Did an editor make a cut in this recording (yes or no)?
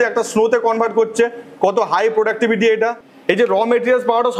yes